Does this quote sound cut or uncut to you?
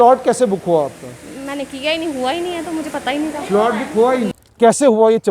cut